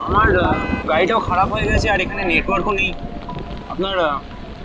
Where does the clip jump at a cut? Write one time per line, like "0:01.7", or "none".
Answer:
none